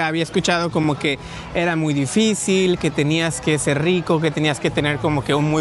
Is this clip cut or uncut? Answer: uncut